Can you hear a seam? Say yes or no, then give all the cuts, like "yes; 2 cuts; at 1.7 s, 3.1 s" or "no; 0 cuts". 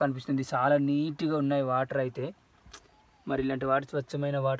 no; 0 cuts